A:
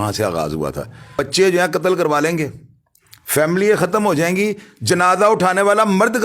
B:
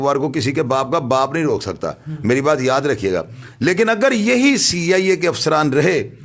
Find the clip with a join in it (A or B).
A